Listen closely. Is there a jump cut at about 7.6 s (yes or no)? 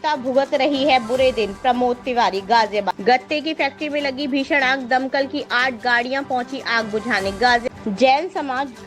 yes